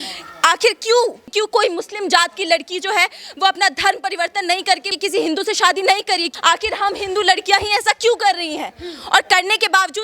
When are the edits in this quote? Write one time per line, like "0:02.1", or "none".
0:01.3
0:04.9
0:06.3

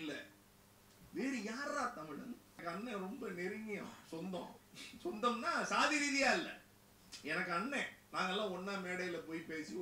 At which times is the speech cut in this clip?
0:02.6

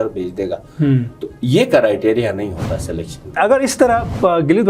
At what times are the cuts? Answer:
0:03.4

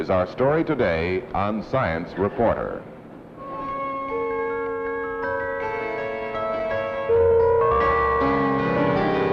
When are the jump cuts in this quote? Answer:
none

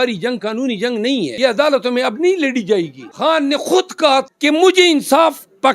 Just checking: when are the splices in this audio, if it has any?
0:01.3
0:03.0
0:04.3

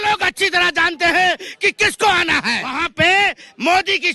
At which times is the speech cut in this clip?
0:02.8

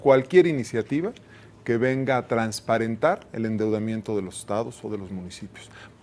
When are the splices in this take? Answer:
none

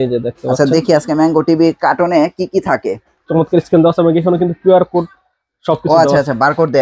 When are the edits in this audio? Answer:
0:03.1

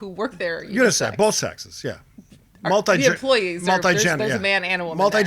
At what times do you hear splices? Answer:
none

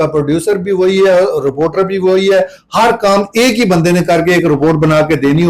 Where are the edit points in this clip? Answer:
none

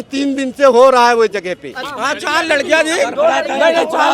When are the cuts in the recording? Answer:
0:01.8

